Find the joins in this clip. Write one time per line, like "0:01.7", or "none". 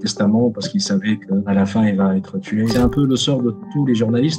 0:01.4
0:02.7